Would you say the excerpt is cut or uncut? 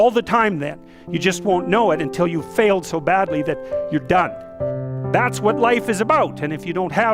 cut